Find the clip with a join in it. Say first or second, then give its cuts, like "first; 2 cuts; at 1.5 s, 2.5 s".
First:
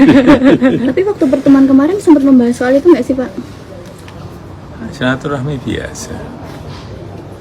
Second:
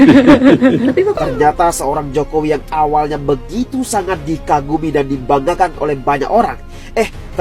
second; 1 cut; at 1.1 s